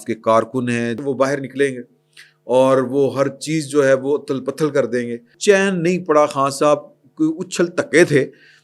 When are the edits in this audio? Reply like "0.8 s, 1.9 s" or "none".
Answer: 1.0 s, 5.3 s